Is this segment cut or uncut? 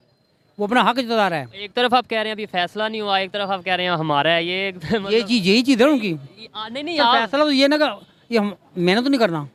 uncut